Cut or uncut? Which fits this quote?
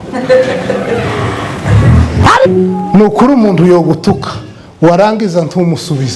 cut